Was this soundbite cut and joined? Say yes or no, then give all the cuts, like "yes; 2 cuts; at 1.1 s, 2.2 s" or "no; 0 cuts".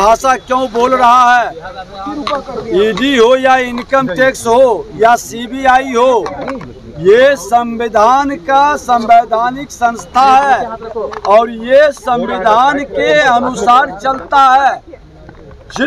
no; 0 cuts